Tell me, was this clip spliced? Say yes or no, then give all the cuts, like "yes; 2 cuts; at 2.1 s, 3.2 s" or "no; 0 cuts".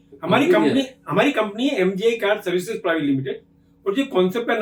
no; 0 cuts